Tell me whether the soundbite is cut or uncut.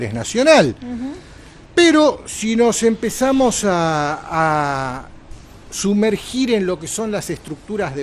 uncut